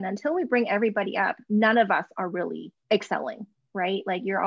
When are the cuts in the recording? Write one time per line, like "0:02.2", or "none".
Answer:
0:02.7

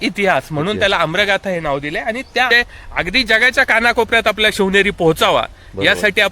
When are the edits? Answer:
0:02.5

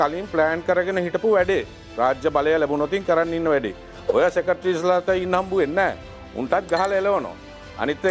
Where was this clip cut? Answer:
none

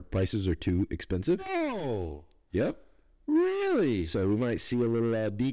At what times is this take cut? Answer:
0:01.4

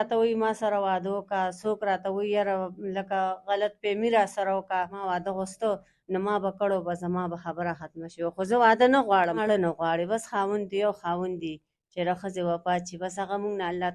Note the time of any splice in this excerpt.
0:05.0
0:09.4

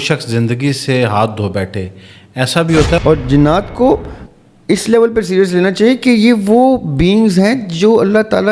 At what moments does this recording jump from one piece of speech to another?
0:03.0

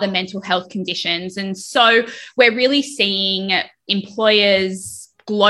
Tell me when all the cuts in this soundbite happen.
0:01.6
0:03.8

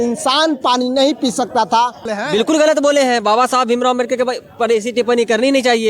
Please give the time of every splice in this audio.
0:02.1

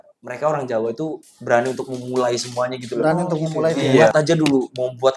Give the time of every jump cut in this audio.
0:04.0

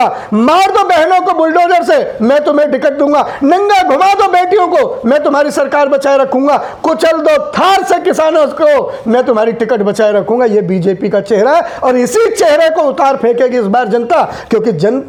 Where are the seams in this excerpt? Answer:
none

